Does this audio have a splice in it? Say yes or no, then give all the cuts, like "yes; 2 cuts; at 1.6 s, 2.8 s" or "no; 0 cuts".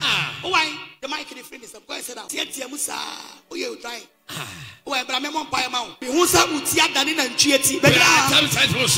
yes; 2 cuts; at 2.3 s, 5.9 s